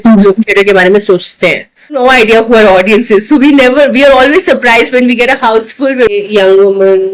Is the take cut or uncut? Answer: cut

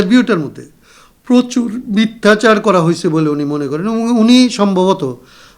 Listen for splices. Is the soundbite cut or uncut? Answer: uncut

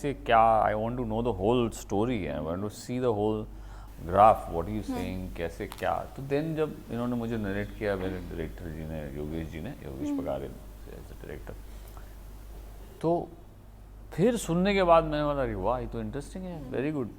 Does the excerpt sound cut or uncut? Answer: uncut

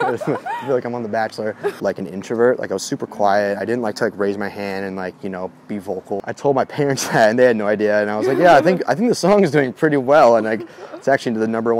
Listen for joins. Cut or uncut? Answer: cut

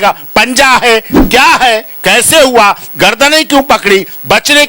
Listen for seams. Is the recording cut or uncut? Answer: cut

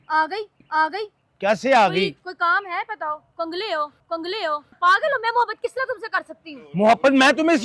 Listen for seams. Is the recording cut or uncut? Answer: cut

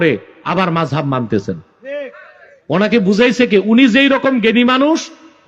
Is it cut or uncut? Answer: uncut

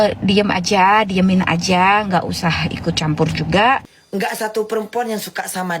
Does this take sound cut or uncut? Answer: cut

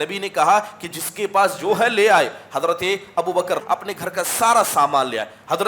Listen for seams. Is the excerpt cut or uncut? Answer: cut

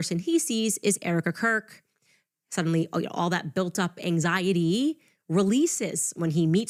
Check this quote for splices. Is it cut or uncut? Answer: uncut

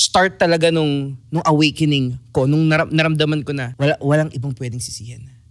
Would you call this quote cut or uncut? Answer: cut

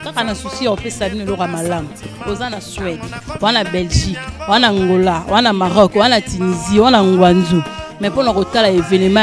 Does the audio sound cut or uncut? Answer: uncut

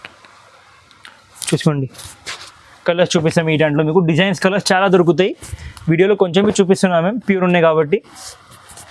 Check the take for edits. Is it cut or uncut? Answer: uncut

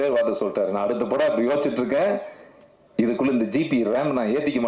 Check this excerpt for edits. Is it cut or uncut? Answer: uncut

